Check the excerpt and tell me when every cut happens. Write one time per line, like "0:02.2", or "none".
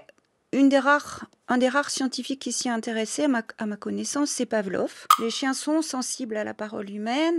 0:05.0